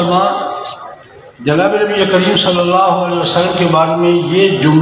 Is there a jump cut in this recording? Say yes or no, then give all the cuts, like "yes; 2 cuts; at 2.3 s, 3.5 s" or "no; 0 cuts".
no; 0 cuts